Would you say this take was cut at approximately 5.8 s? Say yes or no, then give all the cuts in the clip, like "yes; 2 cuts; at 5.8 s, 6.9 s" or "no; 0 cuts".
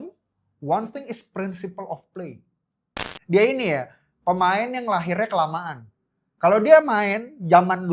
no; 1 cut; at 3.1 s